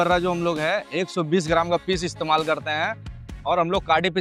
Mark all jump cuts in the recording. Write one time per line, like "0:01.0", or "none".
none